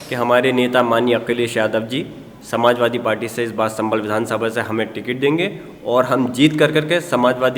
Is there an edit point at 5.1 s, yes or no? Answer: no